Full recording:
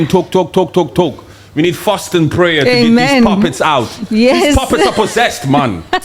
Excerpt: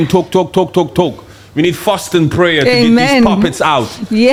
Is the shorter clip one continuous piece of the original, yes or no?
yes